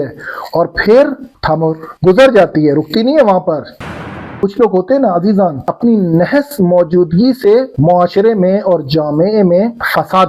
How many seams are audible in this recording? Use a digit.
1